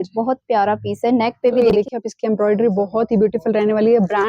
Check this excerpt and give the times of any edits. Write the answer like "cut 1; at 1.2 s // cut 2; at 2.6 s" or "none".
cut 1; at 1.7 s